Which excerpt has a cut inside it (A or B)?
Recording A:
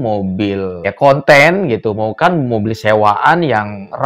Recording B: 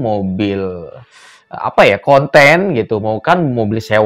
A